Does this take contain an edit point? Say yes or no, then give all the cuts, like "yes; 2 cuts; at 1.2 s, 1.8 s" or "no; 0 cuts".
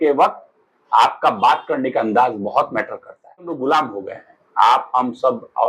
yes; 1 cut; at 3.6 s